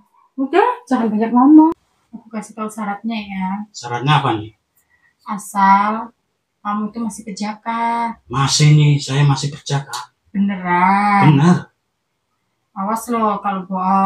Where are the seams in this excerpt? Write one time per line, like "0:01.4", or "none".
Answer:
0:01.7